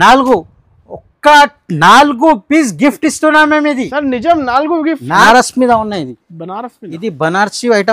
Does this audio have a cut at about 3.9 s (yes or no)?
no